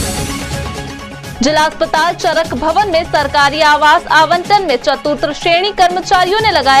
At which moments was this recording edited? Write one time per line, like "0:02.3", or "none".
0:01.2